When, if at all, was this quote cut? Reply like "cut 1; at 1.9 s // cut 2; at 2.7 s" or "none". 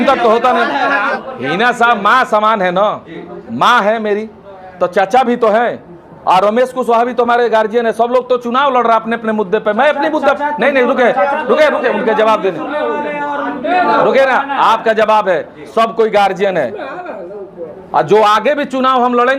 cut 1; at 1.2 s